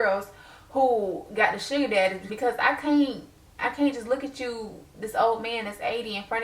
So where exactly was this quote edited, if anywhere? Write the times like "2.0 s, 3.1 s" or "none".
2.3 s